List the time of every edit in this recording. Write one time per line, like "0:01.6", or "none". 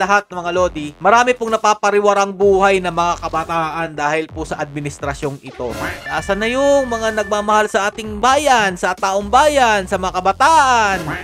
0:06.1